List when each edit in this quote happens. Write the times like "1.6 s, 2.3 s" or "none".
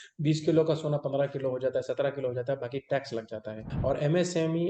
3.6 s